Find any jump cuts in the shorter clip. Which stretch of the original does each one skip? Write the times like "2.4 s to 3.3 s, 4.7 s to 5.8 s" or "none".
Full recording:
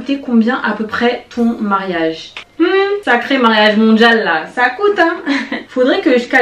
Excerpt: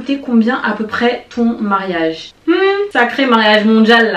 2.3 s to 2.4 s